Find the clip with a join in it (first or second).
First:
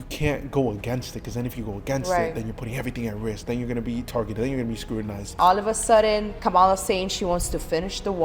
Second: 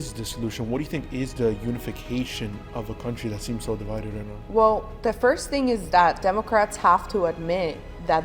first